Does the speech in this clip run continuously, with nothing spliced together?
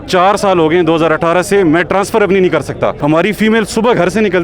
no; 1 cut; at 3.0 s

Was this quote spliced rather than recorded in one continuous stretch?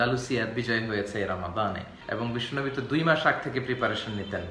yes; 1 cut; at 1.9 s

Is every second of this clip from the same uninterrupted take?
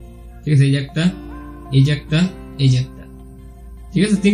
yes; 0 cuts

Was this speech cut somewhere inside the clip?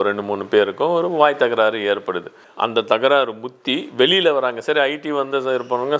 yes; 1 cut; at 2.3 s

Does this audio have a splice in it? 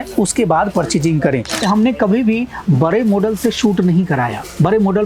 yes; 1 cut; at 1.6 s

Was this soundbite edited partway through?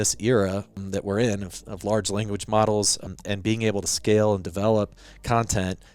yes; 2 cuts; at 0.8 s, 3.0 s

